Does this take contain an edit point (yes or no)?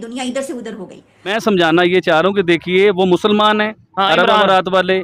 yes